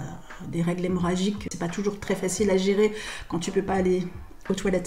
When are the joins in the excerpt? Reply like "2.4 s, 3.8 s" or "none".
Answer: 1.5 s